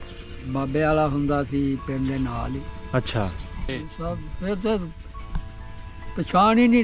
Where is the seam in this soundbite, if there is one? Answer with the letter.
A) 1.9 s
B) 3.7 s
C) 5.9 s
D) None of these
B